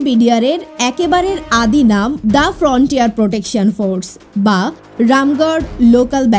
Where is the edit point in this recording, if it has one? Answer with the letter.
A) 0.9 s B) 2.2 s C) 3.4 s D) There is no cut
B